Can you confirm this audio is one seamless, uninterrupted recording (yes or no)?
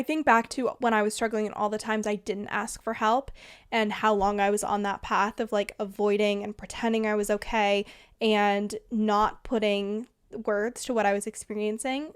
yes